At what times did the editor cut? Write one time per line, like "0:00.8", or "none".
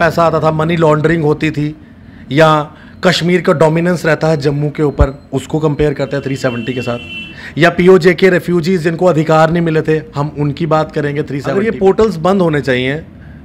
0:12.0